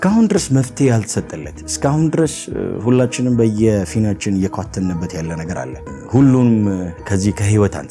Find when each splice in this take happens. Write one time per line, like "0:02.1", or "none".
0:05.9